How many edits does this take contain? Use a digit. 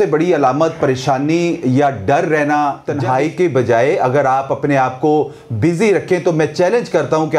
1